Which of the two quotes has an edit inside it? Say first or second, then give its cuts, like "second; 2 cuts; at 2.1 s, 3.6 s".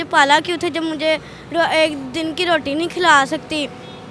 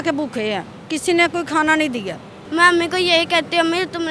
second; 1 cut; at 2.4 s